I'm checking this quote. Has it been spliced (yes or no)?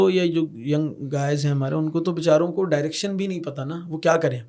no